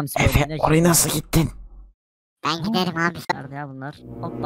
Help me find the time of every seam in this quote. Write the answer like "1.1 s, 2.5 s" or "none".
3.3 s